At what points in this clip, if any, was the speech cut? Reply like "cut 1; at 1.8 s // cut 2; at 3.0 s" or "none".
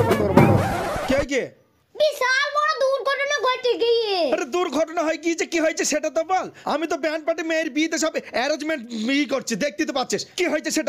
none

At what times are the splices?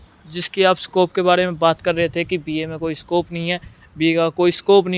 none

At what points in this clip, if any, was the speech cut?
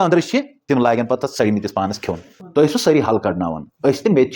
cut 1; at 2.4 s

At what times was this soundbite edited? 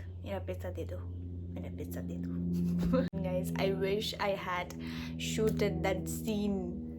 cut 1; at 3.1 s

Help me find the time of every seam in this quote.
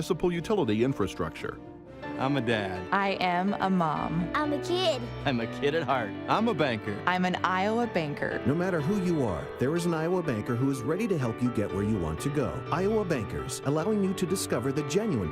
none

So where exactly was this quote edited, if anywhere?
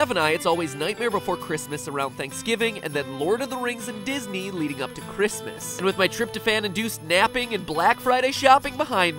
none

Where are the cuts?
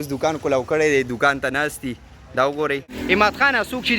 cut 1; at 2.9 s

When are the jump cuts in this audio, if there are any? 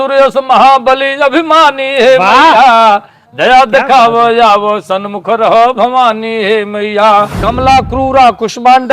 cut 1; at 7.3 s

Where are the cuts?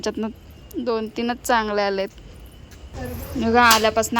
cut 1; at 2.9 s

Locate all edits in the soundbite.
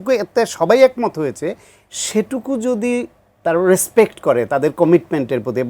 none

